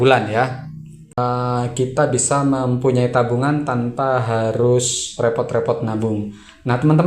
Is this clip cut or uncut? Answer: cut